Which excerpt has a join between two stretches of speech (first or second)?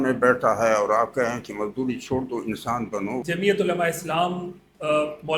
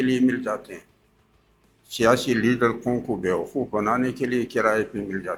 first